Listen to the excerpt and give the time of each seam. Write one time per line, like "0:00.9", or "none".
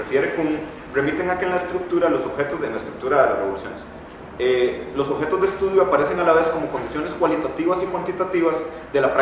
0:04.3